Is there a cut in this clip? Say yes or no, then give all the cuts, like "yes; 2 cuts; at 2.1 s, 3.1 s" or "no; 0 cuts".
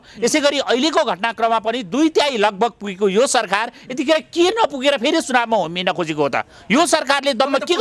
no; 0 cuts